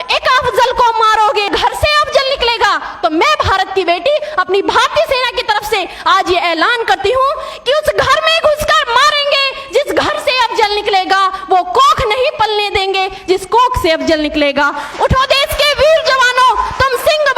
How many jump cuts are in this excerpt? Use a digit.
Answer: 1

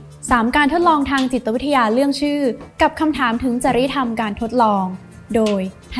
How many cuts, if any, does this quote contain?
0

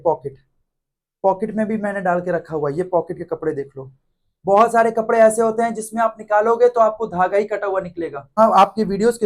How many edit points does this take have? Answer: 1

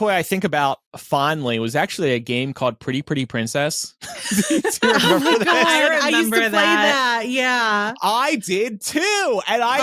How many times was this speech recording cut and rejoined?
1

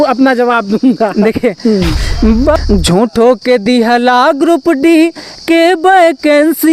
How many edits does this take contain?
1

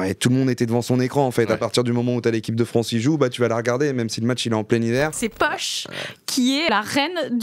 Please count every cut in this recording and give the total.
2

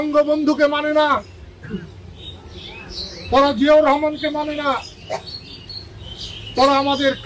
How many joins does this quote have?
0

